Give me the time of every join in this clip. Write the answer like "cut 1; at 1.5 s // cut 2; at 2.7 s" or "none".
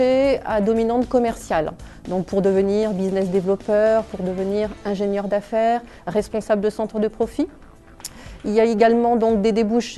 cut 1; at 4.3 s

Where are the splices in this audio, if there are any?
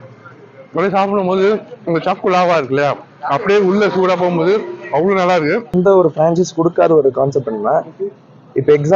cut 1; at 5.7 s

